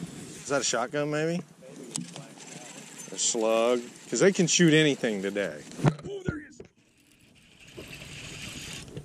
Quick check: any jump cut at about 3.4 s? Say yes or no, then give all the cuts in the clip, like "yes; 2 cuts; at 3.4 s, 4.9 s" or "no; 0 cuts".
no; 0 cuts